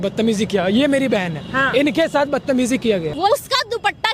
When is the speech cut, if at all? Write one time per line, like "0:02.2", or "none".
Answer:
0:03.2